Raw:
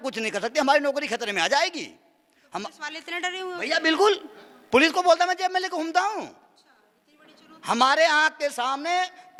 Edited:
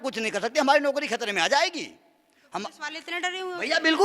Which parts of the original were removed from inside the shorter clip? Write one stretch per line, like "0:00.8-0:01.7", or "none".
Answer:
none